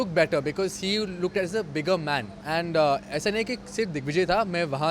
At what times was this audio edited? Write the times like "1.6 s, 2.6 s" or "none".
2.3 s